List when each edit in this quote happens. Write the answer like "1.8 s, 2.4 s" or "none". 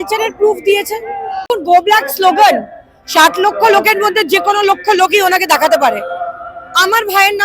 1.5 s